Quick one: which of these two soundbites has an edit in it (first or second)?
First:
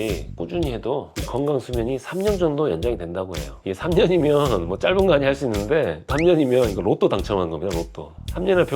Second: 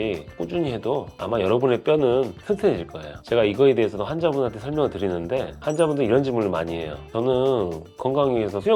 first